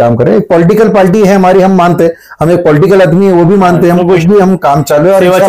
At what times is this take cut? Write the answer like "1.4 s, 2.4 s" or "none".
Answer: 4.2 s